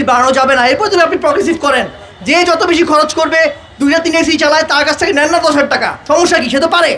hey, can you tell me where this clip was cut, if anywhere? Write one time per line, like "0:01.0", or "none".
0:05.9